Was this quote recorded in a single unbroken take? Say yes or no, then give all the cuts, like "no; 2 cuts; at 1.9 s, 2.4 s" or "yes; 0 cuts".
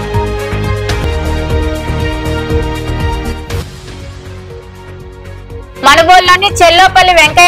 no; 1 cut; at 1.0 s